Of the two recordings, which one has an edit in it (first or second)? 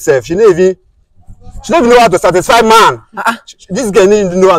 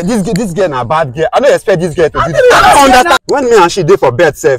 second